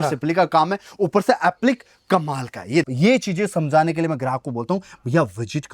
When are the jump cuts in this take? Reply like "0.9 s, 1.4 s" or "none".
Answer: 2.8 s